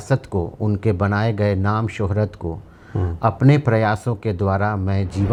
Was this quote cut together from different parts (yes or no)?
no